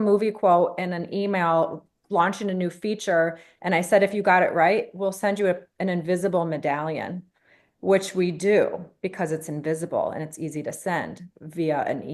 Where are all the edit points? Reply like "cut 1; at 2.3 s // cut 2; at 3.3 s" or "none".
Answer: none